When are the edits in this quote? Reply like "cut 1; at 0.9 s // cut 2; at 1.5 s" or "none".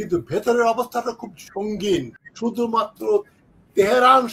cut 1; at 2.2 s